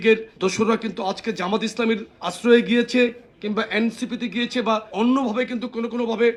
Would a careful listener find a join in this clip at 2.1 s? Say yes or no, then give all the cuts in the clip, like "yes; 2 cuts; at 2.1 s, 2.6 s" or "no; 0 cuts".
no; 0 cuts